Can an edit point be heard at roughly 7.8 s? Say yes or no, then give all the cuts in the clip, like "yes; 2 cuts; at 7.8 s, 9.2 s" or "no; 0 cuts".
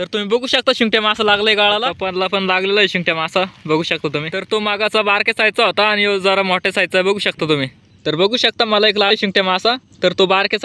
yes; 3 cuts; at 2.0 s, 4.3 s, 7.8 s